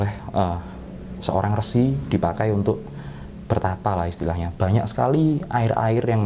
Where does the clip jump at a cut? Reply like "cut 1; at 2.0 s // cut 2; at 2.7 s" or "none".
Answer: none